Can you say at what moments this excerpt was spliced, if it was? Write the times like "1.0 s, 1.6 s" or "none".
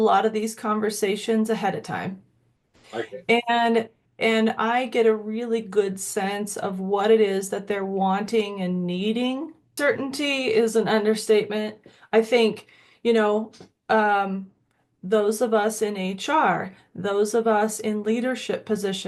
9.7 s